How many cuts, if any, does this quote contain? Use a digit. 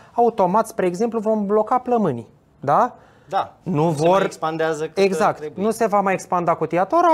0